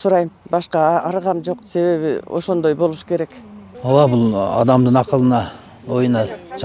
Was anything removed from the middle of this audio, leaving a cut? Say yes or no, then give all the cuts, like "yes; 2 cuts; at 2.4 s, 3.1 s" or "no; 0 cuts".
yes; 1 cut; at 3.7 s